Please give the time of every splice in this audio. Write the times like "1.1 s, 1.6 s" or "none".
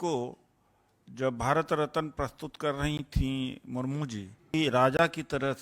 4.5 s